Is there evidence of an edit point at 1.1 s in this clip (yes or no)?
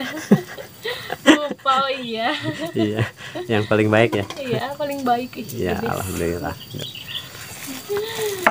no